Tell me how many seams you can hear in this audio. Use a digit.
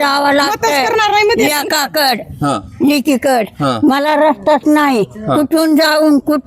0